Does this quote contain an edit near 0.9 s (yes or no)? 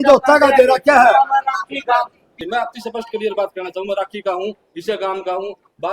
no